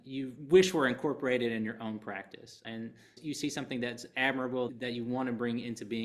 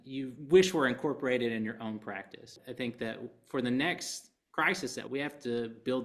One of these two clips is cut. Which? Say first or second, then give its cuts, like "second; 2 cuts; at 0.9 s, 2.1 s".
second; 1 cut; at 2.5 s